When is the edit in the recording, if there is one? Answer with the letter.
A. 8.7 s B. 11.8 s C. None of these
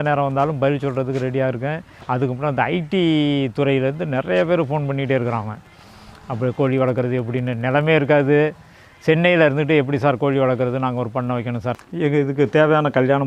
B